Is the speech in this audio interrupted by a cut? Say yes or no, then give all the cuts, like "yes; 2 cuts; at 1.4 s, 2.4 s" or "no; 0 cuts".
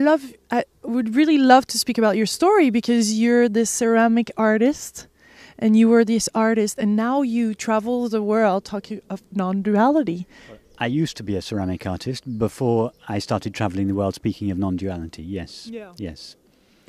yes; 1 cut; at 14.0 s